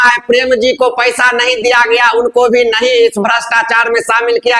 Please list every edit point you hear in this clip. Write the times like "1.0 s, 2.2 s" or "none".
none